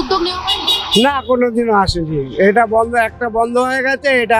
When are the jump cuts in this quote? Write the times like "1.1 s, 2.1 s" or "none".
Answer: none